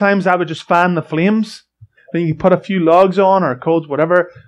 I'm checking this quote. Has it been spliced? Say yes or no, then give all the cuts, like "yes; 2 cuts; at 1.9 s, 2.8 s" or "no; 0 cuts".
yes; 1 cut; at 2.0 s